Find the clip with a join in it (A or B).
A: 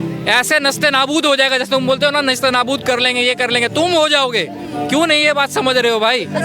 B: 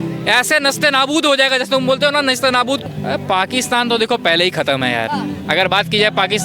B